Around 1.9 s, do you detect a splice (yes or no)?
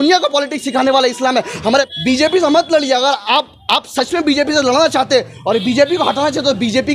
yes